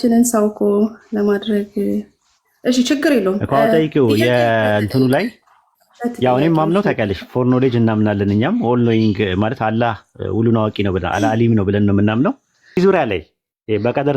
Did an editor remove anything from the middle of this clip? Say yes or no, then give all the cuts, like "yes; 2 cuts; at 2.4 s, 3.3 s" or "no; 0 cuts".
yes; 1 cut; at 12.8 s